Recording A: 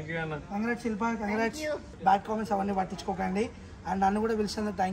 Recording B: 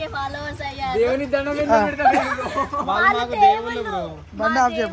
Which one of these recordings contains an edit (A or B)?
A